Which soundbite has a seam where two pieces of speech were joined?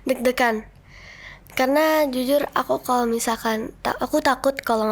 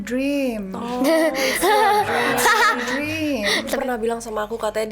second; 1 cut; at 3.8 s

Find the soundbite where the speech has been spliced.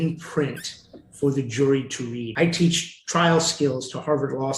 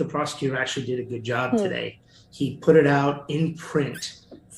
first; 1 cut; at 2.2 s

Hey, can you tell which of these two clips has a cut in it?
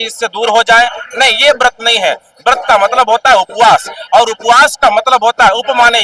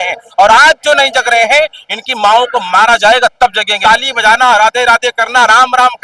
second; 1 cut; at 3.7 s

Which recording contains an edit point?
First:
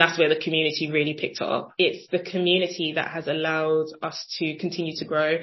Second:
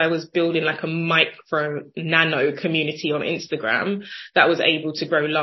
first; 1 cut; at 1.7 s

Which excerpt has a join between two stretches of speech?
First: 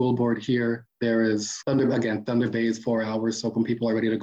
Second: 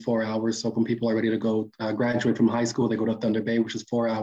first; 2 cuts; at 0.9 s, 1.6 s

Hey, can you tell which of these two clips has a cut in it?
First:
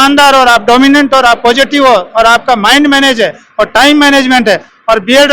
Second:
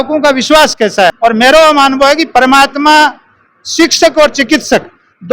second; 1 cut; at 1.2 s

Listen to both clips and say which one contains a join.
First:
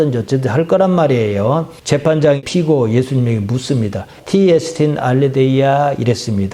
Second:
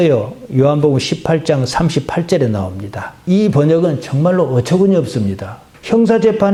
first; 1 cut; at 2.4 s

